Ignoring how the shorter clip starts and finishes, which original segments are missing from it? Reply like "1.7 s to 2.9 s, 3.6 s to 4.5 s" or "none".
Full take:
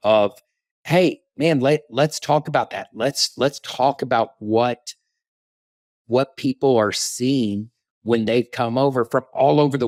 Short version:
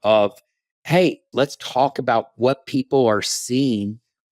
1.2 s to 3.3 s, 4.3 s to 6.0 s